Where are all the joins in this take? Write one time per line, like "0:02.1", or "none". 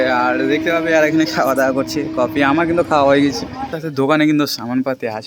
0:03.8